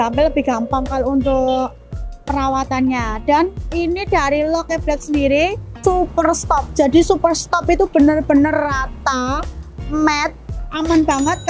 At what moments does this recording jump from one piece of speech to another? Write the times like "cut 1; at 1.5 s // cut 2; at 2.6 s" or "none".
cut 1; at 10.5 s